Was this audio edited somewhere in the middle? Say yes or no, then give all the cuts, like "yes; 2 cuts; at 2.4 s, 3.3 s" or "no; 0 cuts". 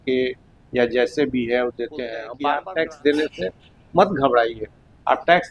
yes; 1 cut; at 2.3 s